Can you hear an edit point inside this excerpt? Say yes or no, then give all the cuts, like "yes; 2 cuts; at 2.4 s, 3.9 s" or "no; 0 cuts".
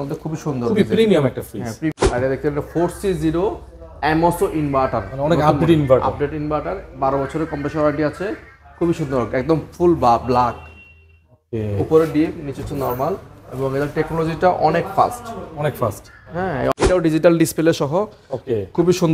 yes; 2 cuts; at 1.9 s, 16.7 s